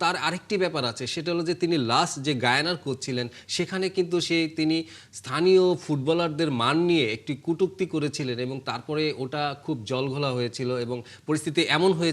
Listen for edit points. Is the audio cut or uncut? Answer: uncut